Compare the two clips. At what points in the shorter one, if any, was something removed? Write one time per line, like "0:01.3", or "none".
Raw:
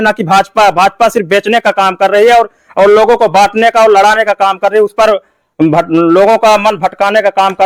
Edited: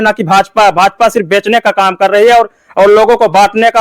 none